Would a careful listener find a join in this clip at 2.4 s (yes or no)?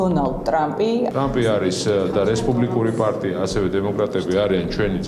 no